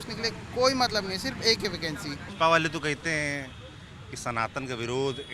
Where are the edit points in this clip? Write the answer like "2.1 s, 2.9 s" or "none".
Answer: 2.3 s